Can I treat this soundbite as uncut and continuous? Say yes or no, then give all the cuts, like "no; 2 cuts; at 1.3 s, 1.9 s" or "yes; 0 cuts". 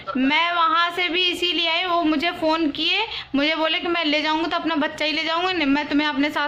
yes; 0 cuts